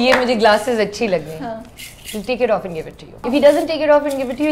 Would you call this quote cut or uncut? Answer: cut